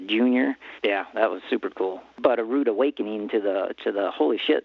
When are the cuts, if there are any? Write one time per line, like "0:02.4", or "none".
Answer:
0:02.1